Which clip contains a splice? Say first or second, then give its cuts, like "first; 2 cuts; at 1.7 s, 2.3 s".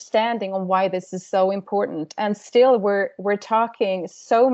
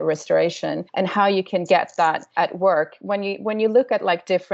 second; 2 cuts; at 0.8 s, 2.2 s